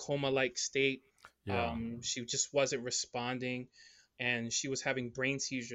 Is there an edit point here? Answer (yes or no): no